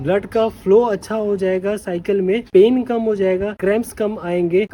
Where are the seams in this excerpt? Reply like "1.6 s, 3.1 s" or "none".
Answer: none